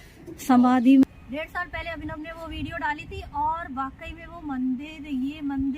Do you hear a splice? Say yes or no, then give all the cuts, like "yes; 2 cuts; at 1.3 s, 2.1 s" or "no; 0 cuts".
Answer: yes; 1 cut; at 1.0 s